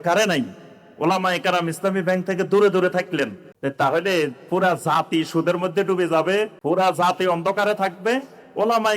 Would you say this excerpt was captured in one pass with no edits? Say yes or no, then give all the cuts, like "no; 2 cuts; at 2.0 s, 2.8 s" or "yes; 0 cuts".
no; 2 cuts; at 3.4 s, 6.6 s